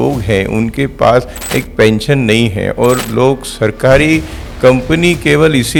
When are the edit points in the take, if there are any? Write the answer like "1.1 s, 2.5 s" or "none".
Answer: none